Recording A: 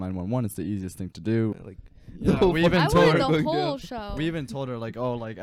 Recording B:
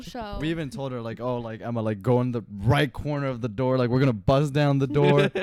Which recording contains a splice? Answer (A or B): A